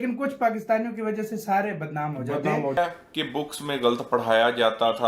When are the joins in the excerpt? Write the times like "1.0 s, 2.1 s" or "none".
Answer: 2.8 s